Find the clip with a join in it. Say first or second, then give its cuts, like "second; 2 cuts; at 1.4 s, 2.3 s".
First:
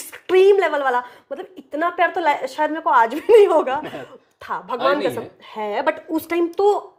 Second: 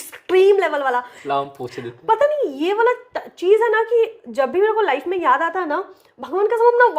second; 1 cut; at 1.1 s